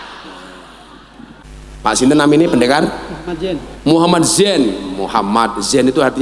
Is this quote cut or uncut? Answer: cut